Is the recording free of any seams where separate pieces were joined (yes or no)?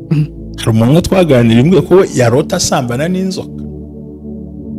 yes